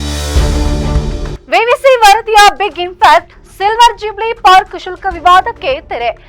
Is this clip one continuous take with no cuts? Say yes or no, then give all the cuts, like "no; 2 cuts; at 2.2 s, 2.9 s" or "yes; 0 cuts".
no; 1 cut; at 1.3 s